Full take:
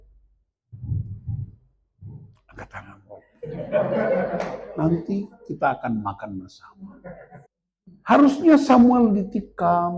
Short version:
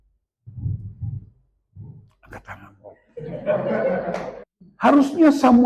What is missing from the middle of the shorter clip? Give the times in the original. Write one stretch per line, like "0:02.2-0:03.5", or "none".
0:04.6-0:07.6

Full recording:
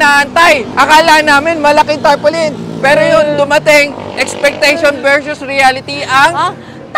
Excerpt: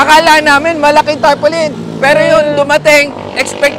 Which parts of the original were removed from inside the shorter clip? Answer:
none

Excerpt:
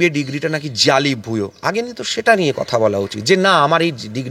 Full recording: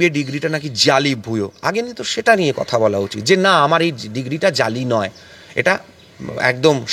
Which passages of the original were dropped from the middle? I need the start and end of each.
none

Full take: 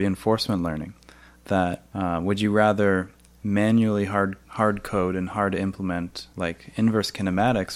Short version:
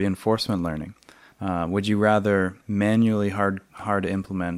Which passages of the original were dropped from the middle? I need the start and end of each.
0:01.3-0:01.8
0:03.1-0:03.4
0:04.5-0:05.3

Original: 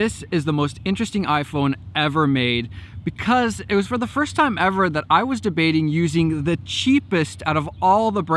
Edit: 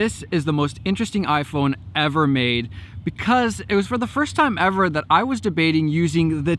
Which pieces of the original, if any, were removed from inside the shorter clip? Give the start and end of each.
none

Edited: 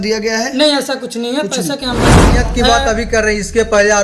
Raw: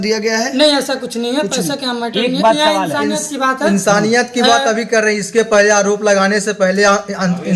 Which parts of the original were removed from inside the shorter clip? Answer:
0:02.3-0:04.1

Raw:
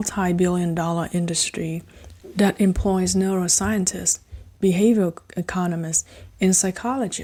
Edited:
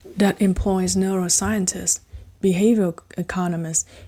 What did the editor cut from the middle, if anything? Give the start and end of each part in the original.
none

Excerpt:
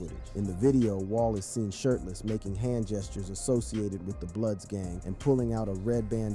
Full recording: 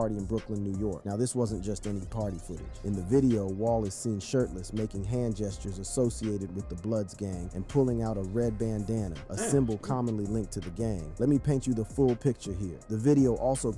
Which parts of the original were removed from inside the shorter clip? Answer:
none

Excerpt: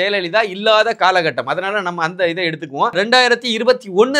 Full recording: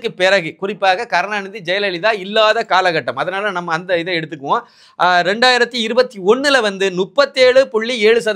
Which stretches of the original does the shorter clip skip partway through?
0:04.6-0:05.2

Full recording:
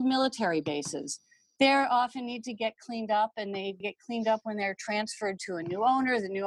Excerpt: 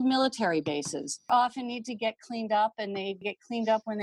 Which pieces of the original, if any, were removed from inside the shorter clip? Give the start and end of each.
0:01.3-0:01.9

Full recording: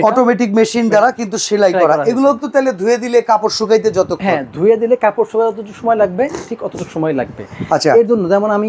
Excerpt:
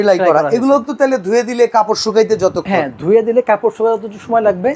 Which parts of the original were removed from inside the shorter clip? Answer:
none

